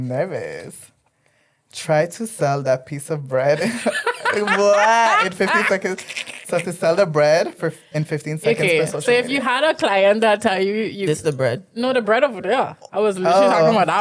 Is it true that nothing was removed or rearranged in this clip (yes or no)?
yes